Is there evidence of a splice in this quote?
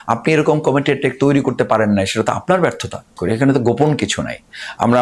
yes; 1 cut; at 3.2 s

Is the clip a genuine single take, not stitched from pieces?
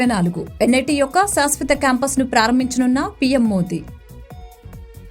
yes; 0 cuts

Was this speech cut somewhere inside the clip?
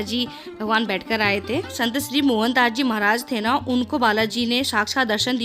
yes; 1 cut; at 1.8 s

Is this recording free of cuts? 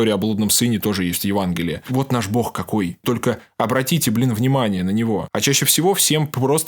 no; 3 cuts; at 1.8 s, 3.0 s, 5.3 s

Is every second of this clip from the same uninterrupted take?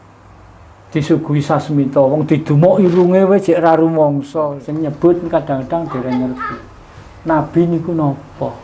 no; 1 cut; at 4.6 s

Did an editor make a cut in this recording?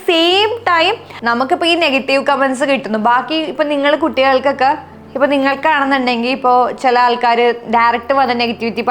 yes; 1 cut; at 1.1 s

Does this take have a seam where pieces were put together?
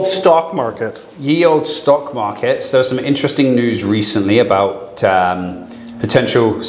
no; 0 cuts

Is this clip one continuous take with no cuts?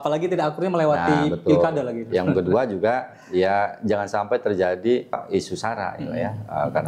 no; 1 cut; at 5.2 s

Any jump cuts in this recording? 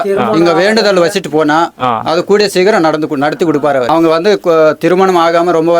yes; 1 cut; at 3.9 s

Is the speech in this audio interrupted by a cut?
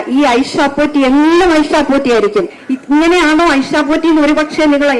yes; 1 cut; at 2.6 s

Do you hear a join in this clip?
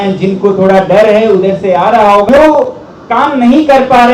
yes; 1 cut; at 2.3 s

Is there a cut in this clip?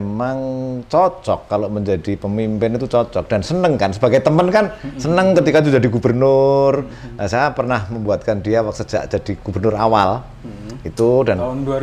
no; 0 cuts

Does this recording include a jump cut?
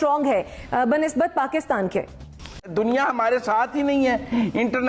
yes; 1 cut; at 2.6 s

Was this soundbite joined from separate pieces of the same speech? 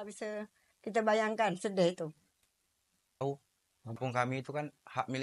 yes; 1 cut; at 3.2 s

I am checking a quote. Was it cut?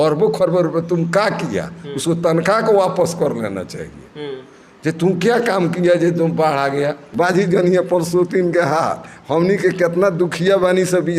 yes; 1 cut; at 7.0 s

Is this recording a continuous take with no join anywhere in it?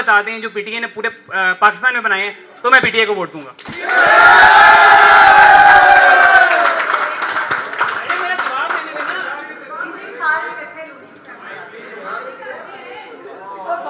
yes; 0 cuts

